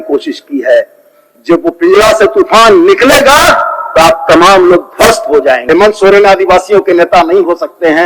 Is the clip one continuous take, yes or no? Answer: no